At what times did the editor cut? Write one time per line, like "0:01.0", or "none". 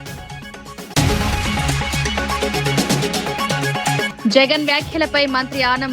0:00.9
0:02.4
0:04.1